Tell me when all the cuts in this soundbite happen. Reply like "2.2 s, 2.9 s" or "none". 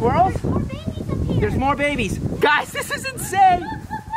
none